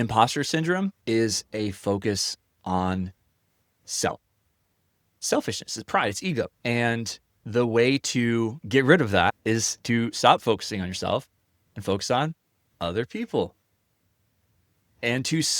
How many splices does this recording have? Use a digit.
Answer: 4